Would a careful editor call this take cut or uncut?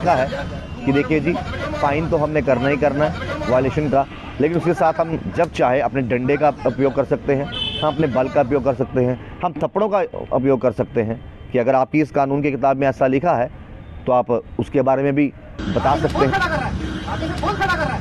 cut